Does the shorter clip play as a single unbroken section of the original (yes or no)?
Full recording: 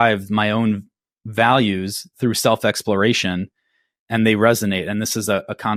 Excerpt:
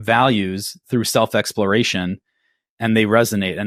yes